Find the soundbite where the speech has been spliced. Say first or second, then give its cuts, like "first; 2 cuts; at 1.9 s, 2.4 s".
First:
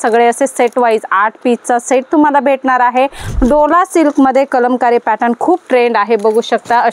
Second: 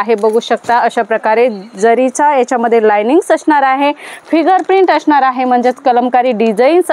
first; 1 cut; at 3.2 s